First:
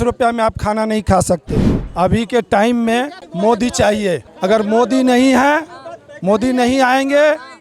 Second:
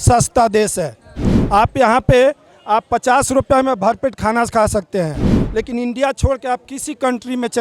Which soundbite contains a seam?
first; 3 cuts; at 1.8 s, 3.2 s, 4.3 s

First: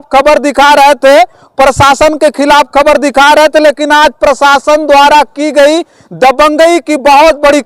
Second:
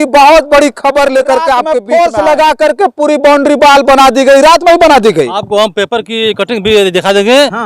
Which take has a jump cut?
second; 1 cut; at 1.8 s

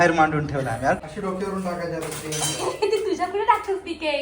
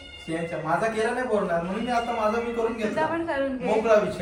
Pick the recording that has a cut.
first; 1 cut; at 1.0 s

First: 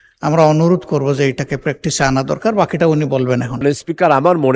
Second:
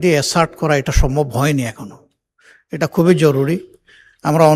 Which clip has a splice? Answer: first; 1 cut; at 3.6 s

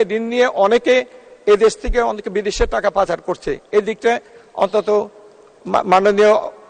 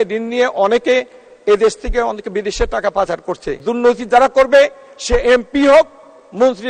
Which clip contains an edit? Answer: second; 1 cut; at 3.6 s

